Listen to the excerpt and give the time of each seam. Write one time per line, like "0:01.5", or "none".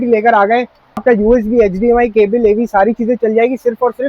0:01.0

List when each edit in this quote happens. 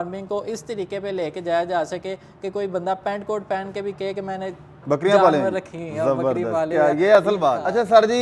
none

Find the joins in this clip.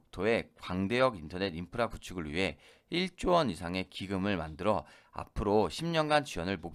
none

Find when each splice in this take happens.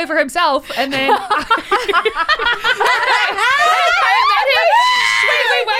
none

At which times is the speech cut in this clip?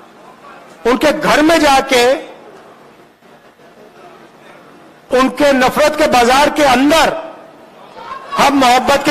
none

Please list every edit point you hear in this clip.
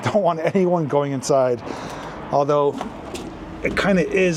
none

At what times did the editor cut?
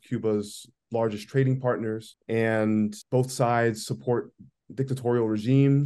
0:02.1
0:03.0

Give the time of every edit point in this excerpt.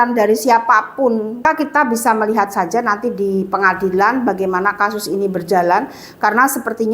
0:01.4

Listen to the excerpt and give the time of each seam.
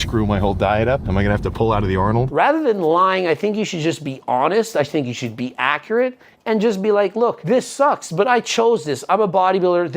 0:01.1
0:02.3
0:07.4

